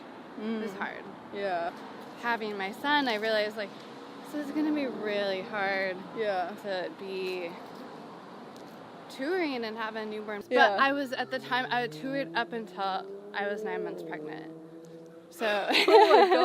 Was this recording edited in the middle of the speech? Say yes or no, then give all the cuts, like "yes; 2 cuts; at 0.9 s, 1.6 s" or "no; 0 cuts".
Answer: yes; 2 cuts; at 1.7 s, 10.4 s